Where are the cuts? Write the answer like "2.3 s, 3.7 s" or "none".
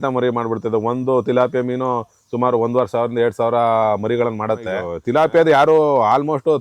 4.9 s

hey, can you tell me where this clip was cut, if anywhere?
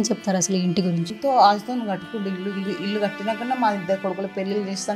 1.1 s

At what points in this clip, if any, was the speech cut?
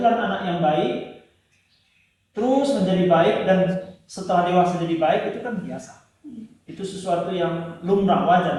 none

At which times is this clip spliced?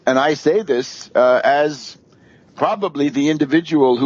3.1 s

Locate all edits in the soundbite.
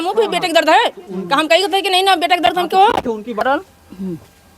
3.4 s

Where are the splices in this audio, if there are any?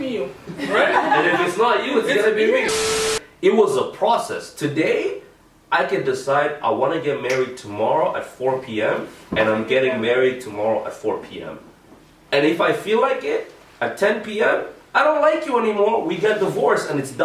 3.1 s

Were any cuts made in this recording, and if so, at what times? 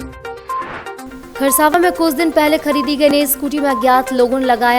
1.1 s

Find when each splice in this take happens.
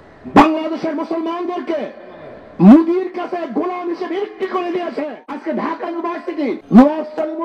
5.4 s, 6.6 s

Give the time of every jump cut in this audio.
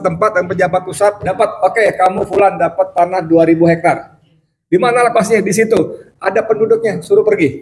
1.2 s

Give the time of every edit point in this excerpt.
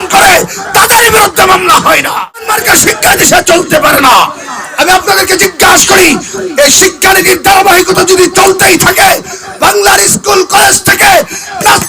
2.5 s

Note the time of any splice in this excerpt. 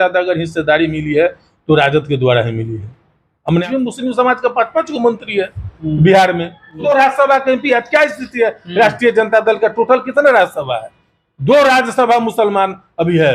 3.6 s, 6.8 s

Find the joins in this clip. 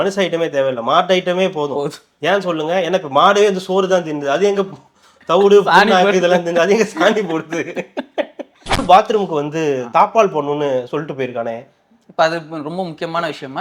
8.8 s

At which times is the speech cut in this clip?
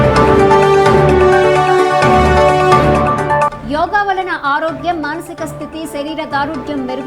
1.3 s

